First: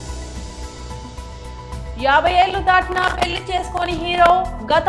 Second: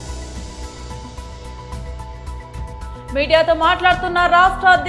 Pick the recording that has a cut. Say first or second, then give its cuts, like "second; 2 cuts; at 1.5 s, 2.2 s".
second; 1 cut; at 1.9 s